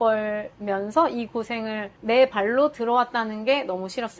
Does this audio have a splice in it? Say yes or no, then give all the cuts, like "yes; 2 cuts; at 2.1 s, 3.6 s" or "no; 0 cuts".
no; 0 cuts